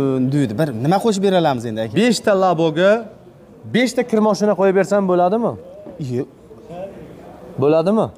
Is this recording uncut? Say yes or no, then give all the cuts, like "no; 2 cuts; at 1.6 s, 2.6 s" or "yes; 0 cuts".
no; 1 cut; at 1.8 s